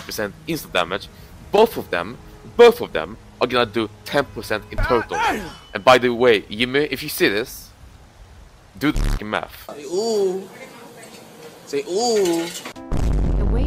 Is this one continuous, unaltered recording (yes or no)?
no